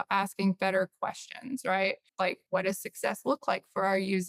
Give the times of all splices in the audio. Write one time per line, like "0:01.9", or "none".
0:02.3